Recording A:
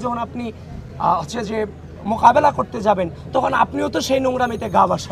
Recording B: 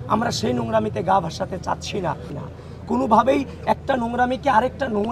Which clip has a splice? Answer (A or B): B